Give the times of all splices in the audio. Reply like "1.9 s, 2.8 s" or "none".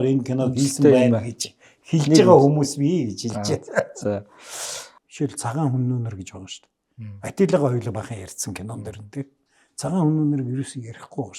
5.0 s